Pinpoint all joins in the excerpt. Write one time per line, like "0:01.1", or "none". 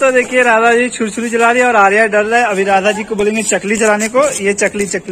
none